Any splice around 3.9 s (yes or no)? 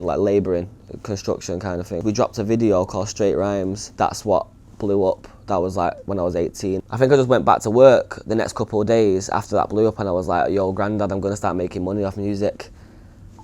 yes